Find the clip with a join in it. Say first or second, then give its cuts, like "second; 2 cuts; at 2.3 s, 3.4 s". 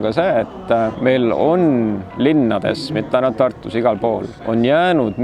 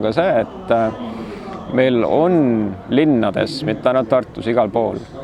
first; 2 cuts; at 0.9 s, 4.3 s